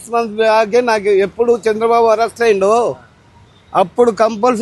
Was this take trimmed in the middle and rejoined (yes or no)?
no